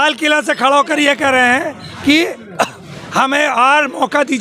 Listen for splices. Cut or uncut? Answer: uncut